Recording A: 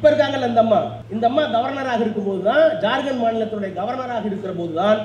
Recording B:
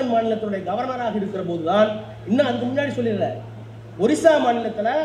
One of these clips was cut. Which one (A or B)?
A